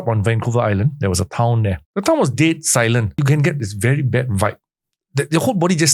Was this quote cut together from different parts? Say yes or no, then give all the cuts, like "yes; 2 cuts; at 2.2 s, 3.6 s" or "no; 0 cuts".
yes; 2 cuts; at 1.8 s, 3.2 s